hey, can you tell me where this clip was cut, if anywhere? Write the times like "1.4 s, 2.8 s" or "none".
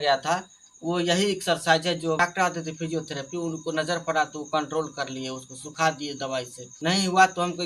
2.2 s, 6.6 s